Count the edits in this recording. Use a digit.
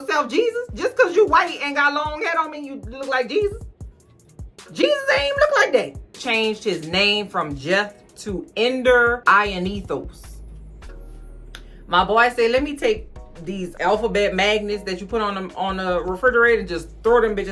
1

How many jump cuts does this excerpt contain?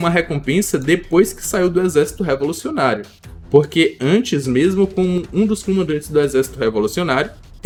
0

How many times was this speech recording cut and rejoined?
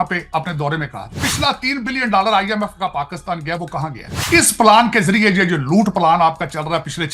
2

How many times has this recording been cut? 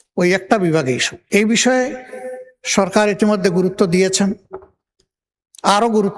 1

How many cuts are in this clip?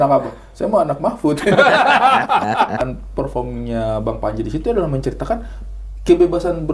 1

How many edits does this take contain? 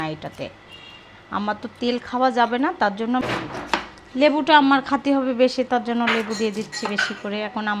1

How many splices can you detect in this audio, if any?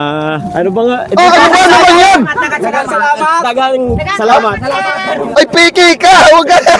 0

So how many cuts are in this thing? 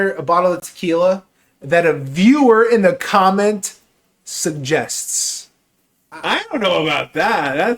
1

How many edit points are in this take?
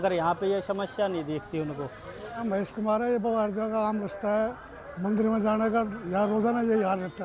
1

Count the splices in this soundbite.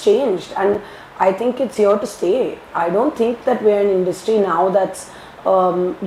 0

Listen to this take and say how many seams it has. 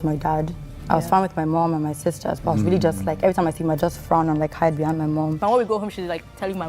1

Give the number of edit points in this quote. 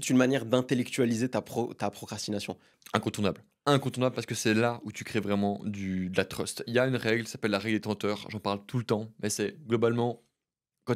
1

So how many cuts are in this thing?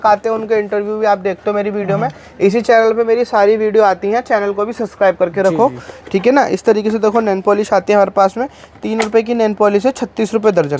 0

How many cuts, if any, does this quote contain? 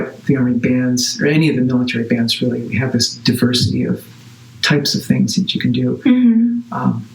0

